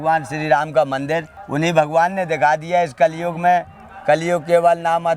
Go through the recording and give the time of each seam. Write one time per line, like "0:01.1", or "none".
0:01.4